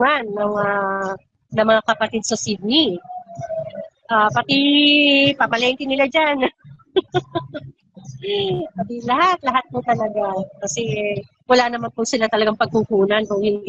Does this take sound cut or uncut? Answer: uncut